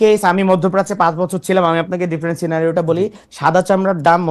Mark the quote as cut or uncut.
uncut